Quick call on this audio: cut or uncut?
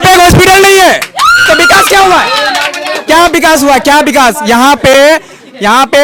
uncut